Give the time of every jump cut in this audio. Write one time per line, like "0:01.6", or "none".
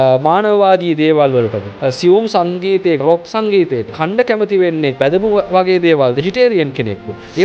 0:01.7
0:03.0
0:04.0
0:05.0
0:06.2